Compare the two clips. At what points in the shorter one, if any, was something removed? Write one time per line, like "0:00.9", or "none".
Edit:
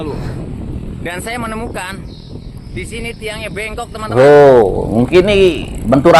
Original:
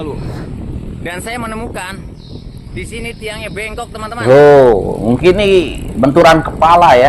0:04.1